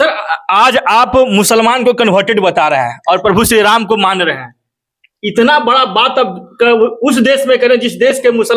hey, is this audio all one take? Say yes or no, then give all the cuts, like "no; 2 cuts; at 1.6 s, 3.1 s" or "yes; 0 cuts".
yes; 0 cuts